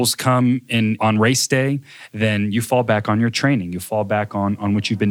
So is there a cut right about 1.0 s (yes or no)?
yes